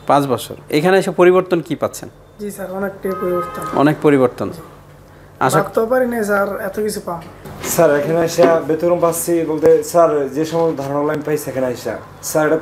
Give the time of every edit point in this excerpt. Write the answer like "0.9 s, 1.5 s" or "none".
7.6 s